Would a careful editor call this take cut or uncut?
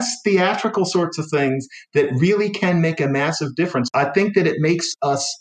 cut